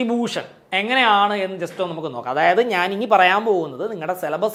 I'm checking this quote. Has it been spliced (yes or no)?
no